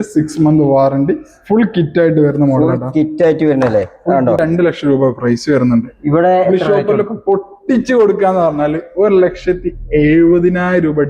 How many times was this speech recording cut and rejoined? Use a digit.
1